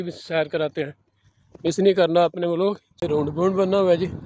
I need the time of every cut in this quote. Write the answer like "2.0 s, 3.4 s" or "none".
3.0 s